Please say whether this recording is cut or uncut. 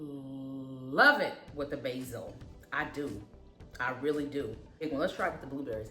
cut